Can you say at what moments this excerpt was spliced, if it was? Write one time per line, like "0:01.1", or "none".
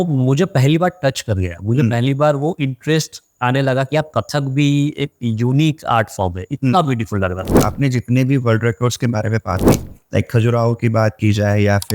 0:07.6
0:09.6